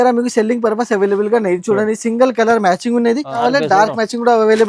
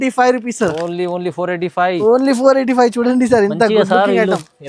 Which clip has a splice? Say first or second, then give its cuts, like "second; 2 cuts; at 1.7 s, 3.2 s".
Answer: first; 1 cut; at 3.4 s